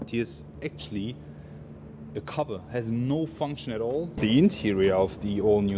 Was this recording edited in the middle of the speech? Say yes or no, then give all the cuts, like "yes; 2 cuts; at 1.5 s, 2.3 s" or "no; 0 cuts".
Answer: yes; 1 cut; at 4.2 s